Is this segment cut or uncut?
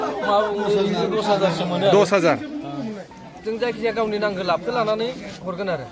cut